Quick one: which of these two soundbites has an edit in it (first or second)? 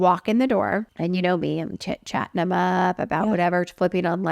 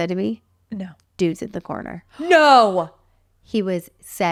first